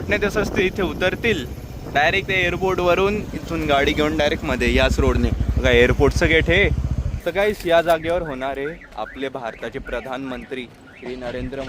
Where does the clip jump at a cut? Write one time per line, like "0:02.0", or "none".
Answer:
0:07.2